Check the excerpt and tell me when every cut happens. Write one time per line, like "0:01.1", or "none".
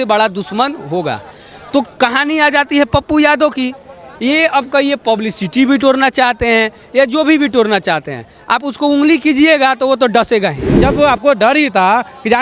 0:10.7